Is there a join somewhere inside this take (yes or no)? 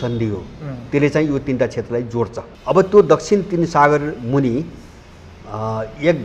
yes